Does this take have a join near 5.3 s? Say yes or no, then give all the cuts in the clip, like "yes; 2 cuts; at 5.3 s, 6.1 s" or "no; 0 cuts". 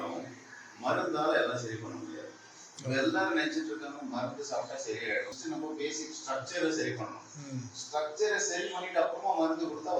yes; 1 cut; at 5.3 s